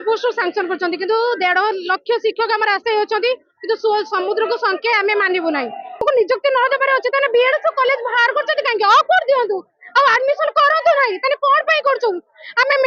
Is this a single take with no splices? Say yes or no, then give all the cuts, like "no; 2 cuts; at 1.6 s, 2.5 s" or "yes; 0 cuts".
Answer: no; 1 cut; at 6.0 s